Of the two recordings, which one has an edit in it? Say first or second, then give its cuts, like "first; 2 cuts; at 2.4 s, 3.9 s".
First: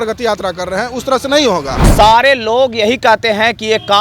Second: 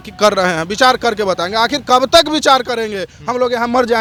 first; 1 cut; at 1.9 s